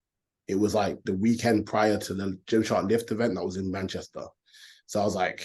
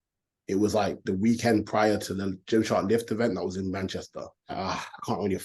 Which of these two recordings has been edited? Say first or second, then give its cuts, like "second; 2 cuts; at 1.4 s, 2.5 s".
second; 1 cut; at 4.5 s